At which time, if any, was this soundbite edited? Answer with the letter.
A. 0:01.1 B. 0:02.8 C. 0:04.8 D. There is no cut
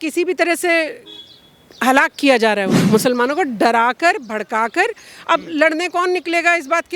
B